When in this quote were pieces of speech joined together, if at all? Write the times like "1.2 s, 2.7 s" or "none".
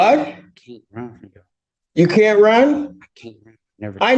1.6 s